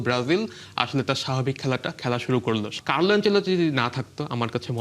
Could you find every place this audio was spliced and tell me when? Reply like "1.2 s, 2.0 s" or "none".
2.8 s